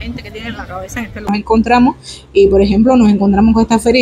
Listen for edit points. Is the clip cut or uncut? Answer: cut